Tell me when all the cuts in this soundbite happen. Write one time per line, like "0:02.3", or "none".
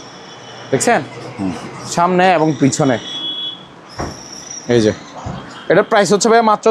none

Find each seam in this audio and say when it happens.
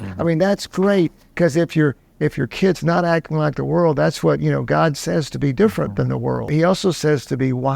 0:06.5

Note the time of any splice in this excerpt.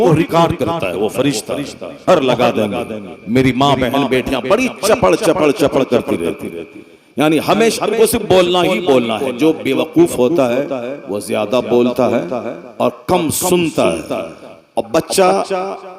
0:02.1

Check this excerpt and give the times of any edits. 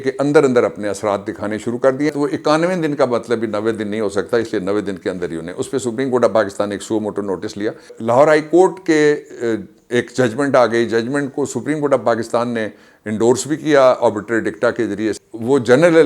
0:02.1
0:08.0
0:15.1

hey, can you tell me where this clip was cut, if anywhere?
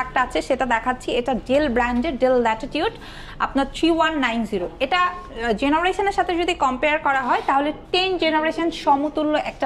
none

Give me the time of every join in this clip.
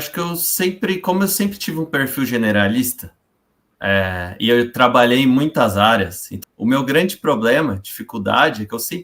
0:06.4

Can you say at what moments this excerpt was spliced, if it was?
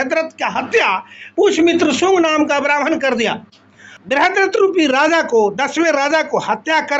0:03.9

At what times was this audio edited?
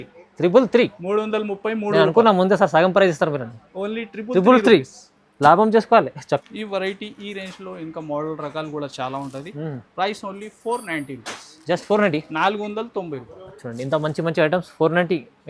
0:06.5

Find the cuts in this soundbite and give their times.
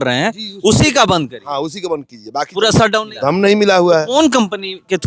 0:03.1

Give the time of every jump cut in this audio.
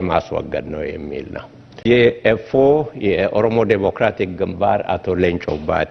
0:01.8

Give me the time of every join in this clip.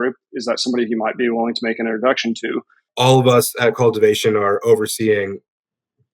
0:02.8

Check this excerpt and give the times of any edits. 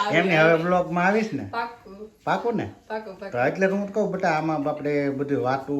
none

